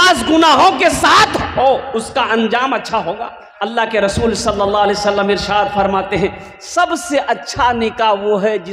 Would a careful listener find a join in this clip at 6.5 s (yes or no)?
no